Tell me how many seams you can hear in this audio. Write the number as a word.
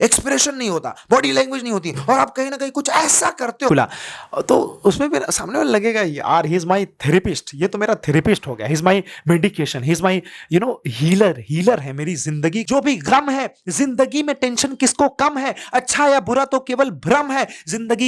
two